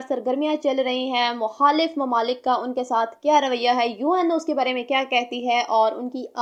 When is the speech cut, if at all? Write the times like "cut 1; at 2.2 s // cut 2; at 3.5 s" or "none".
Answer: none